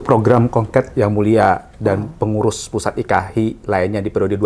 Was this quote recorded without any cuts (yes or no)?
yes